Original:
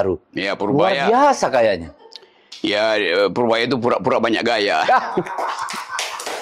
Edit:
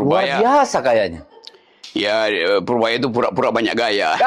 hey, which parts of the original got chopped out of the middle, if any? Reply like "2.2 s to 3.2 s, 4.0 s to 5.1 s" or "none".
none